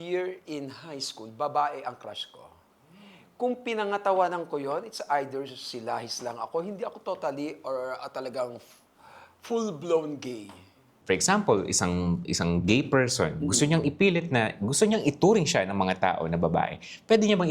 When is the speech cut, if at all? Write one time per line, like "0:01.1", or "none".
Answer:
0:10.9